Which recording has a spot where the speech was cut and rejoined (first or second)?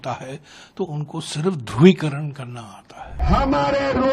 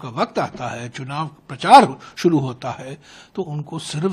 first